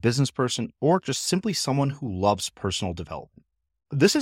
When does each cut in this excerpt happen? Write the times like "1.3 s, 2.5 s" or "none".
none